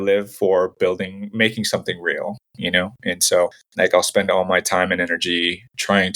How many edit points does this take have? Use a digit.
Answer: 1